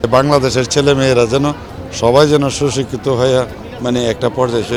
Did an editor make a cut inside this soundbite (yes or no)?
no